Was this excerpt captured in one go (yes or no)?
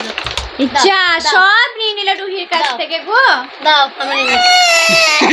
yes